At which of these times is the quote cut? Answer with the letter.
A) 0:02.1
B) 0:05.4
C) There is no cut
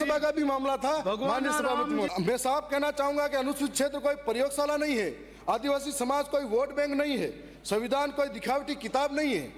A